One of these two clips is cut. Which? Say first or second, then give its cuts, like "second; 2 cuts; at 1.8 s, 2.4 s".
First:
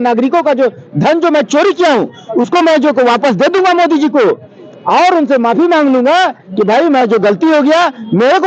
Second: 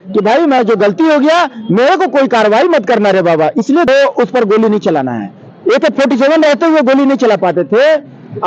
second; 1 cut; at 3.9 s